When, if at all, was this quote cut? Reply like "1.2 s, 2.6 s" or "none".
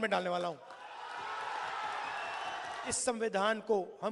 3.0 s